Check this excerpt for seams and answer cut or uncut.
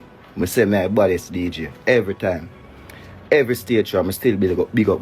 uncut